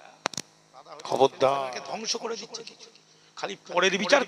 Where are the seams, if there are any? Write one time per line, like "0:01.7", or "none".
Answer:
0:01.7

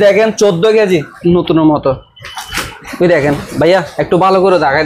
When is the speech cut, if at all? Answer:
0:01.1

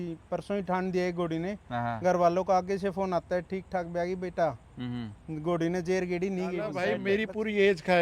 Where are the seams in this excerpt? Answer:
0:06.8

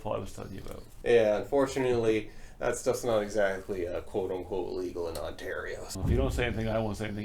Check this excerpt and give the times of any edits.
0:00.9
0:05.9

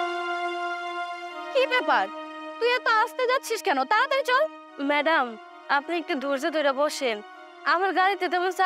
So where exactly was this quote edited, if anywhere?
0:01.5

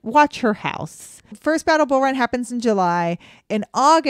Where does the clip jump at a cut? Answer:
0:01.3

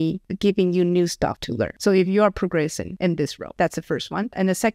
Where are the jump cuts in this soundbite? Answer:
0:03.5

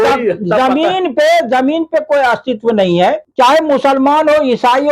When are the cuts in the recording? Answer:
0:03.2

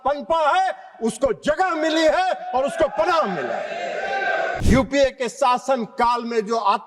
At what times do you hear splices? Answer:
0:04.6

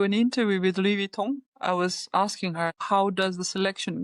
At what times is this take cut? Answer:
0:01.5
0:02.8

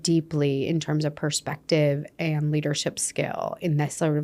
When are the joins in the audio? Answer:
none

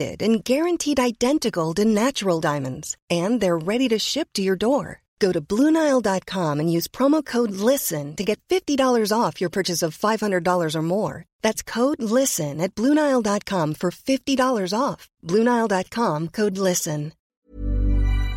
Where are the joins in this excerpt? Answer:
0:17.5

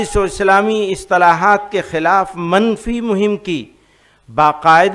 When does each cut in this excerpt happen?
none

